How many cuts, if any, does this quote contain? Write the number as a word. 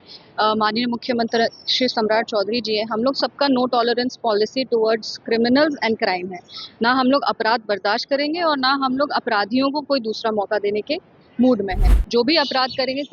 one